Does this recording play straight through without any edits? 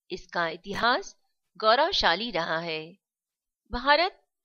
yes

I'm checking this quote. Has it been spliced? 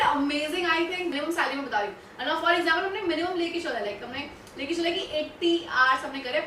yes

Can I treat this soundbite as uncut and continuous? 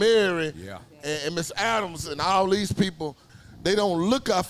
no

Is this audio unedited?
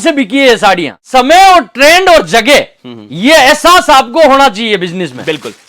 no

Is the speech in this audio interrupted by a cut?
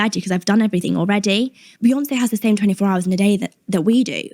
yes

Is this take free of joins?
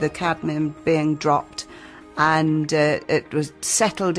yes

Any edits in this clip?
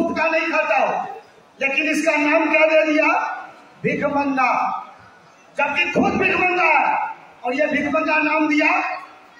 no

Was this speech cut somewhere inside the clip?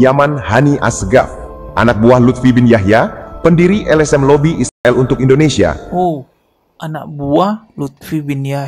no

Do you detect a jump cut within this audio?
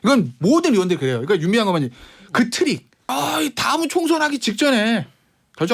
yes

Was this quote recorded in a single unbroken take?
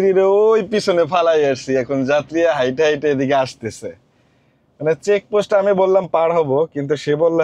yes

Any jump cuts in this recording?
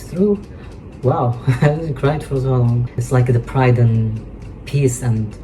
yes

